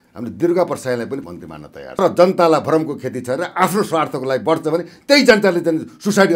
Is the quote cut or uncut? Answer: uncut